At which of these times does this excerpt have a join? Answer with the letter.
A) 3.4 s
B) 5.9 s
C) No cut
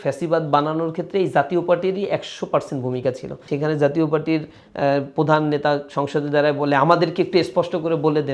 A